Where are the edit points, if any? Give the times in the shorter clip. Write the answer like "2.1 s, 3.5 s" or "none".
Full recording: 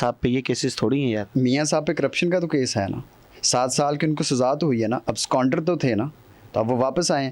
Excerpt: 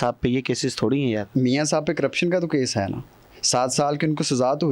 none